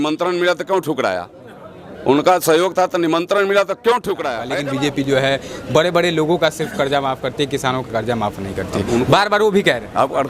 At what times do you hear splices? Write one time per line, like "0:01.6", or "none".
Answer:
0:04.6